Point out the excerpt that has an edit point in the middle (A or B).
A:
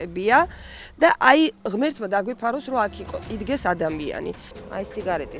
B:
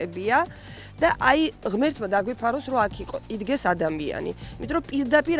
A